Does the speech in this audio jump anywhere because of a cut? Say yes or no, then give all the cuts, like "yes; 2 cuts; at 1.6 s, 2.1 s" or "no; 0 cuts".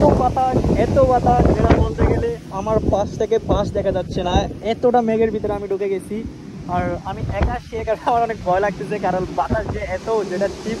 no; 0 cuts